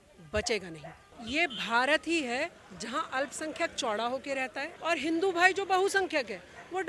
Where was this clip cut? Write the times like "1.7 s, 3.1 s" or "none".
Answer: 4.7 s

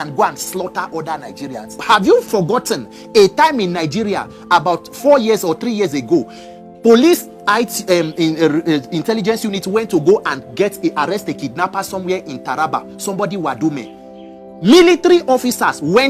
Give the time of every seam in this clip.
1.8 s

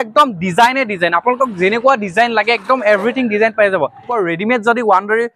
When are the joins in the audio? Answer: 4.1 s

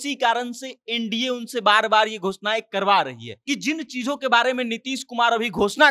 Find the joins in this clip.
3.3 s

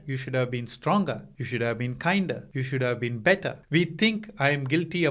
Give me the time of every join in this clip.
1.3 s, 2.5 s, 3.5 s

